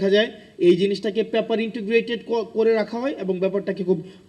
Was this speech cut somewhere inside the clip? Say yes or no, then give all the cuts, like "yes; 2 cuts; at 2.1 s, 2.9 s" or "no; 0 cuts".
no; 0 cuts